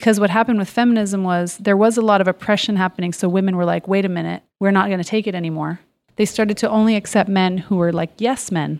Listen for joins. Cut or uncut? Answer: cut